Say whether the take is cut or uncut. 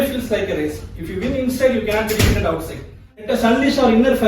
cut